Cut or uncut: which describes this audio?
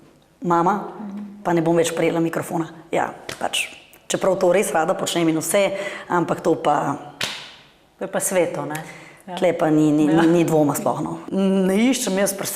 cut